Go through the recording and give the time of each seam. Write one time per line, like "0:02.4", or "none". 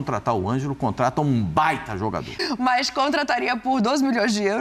0:02.4

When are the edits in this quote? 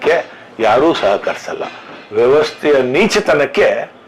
none

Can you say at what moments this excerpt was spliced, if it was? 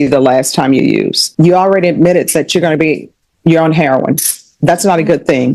0:01.2

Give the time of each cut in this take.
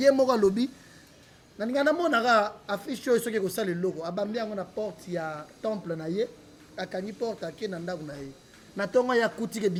none

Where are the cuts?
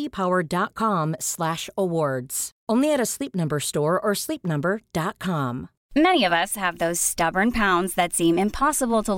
0:05.7

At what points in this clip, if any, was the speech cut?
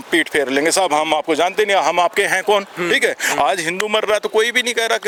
none

